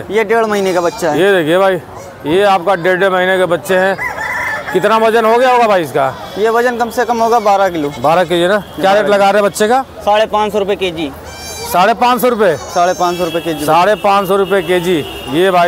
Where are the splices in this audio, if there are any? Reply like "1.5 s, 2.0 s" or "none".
none

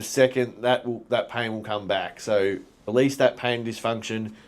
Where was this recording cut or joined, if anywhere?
2.7 s

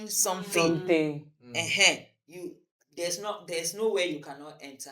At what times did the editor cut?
none

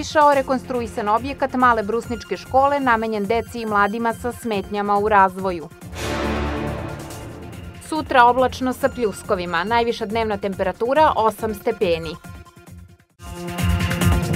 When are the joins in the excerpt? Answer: 13.3 s

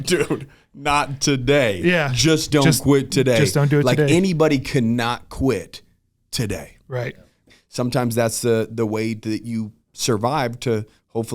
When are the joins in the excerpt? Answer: 7.4 s

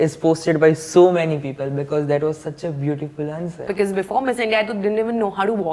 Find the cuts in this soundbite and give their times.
3.7 s

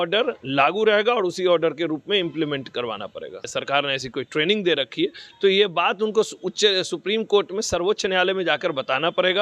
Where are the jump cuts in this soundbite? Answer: 3.4 s

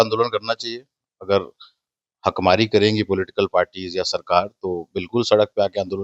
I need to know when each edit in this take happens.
none

